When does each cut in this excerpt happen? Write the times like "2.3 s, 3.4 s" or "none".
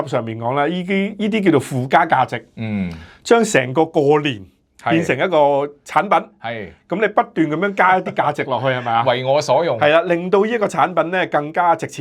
none